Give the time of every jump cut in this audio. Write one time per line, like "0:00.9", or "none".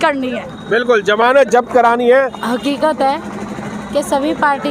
0:02.4